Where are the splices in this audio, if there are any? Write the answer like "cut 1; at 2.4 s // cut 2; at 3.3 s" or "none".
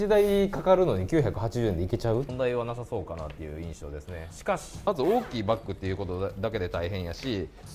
cut 1; at 2.3 s // cut 2; at 4.9 s